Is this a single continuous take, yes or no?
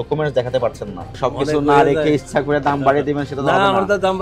no